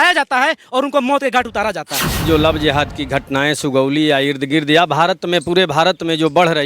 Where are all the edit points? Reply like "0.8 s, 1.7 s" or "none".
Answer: 2.2 s